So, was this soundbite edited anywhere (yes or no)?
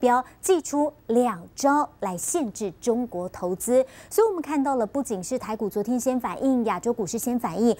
yes